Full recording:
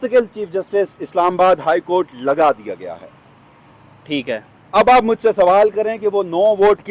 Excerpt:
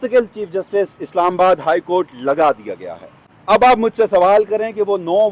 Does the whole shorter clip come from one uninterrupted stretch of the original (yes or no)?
no